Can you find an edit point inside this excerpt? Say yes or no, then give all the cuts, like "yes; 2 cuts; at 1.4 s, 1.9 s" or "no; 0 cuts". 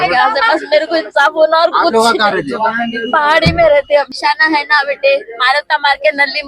yes; 1 cut; at 4.1 s